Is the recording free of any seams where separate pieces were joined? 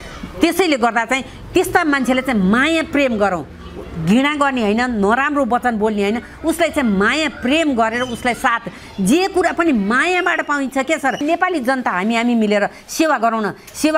no; 1 cut; at 11.2 s

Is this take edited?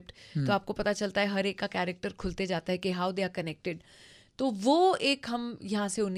no; 0 cuts

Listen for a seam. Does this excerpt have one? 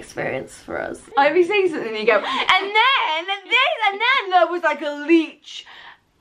yes; 1 cut; at 1.0 s

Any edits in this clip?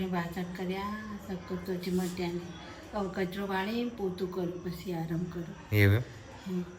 no; 0 cuts

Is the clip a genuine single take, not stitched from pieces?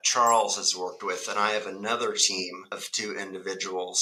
yes; 0 cuts

